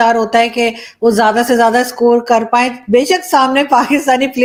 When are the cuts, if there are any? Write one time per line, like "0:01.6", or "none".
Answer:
none